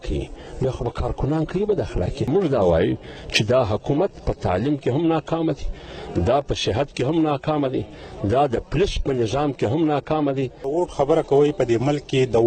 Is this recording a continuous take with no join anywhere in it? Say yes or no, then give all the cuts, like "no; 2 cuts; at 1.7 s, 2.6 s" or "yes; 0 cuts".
no; 2 cuts; at 2.3 s, 10.6 s